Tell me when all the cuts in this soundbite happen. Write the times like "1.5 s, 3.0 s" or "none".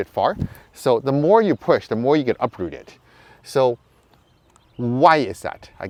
none